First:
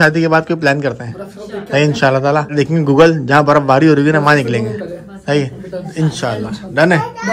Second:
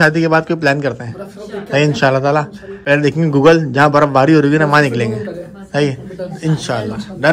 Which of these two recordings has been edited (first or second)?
first